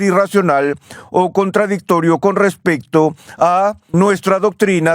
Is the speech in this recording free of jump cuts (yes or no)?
no